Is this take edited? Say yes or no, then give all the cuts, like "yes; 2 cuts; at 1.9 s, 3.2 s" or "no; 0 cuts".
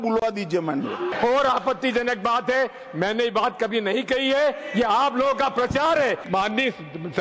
yes; 2 cuts; at 1.1 s, 6.2 s